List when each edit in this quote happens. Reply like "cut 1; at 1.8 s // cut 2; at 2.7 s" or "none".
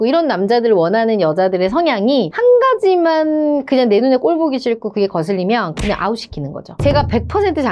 cut 1; at 6.6 s